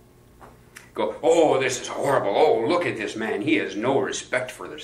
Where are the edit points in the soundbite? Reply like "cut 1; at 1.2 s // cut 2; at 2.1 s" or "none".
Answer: none